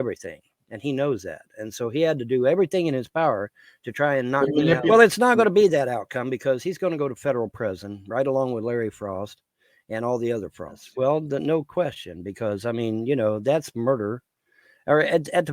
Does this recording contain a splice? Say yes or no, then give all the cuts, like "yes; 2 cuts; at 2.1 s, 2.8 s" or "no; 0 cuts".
no; 0 cuts